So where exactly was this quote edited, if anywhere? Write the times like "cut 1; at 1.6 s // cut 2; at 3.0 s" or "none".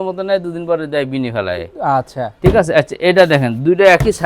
none